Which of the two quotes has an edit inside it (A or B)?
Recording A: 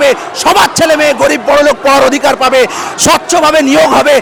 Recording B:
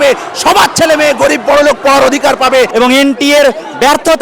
B